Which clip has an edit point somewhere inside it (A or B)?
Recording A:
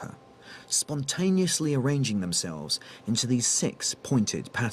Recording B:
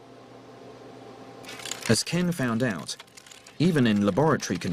B